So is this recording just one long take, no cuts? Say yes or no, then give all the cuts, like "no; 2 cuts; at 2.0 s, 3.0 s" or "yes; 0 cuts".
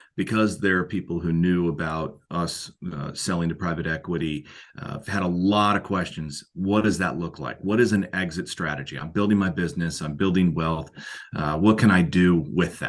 yes; 0 cuts